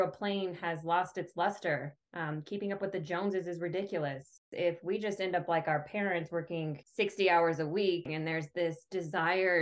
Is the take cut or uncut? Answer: cut